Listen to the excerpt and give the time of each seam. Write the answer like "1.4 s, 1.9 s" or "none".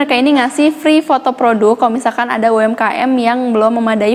none